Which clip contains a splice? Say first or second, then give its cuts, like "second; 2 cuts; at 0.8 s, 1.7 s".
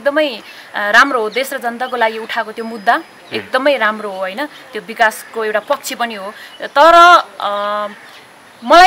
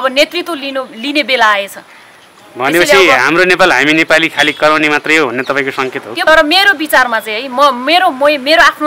second; 1 cut; at 6.2 s